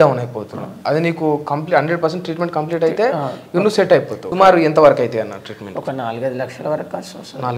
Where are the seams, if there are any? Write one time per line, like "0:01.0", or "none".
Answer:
0:04.3